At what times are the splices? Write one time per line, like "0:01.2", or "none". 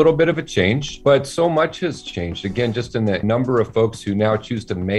0:01.0
0:03.2

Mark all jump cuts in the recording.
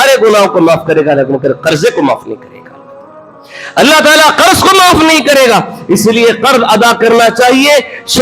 none

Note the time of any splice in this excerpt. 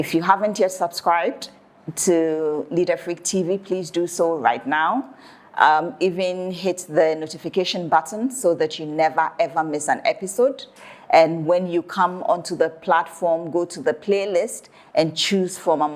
none

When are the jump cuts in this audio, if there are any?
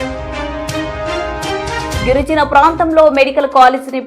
0:02.0

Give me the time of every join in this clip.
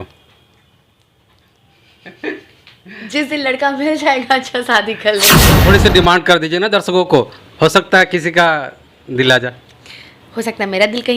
0:05.6

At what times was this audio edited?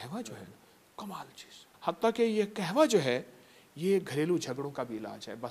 0:01.7

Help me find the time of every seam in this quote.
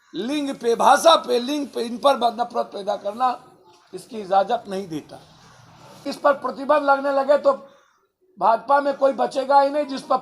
0:06.1

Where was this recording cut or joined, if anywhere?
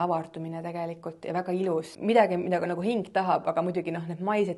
0:01.9

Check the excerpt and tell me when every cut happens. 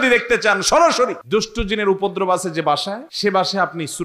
0:01.2
0:03.1

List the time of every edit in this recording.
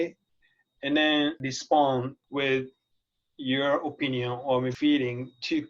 0:01.4
0:02.2
0:04.7

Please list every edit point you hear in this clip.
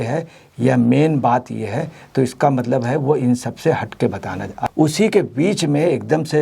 0:04.7

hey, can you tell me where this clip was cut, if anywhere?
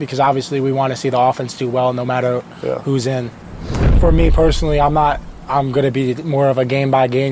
0:03.9

